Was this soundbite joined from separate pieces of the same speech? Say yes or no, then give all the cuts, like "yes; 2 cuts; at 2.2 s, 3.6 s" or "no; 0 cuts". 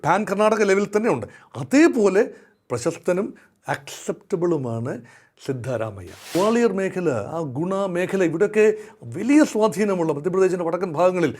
yes; 1 cut; at 6.2 s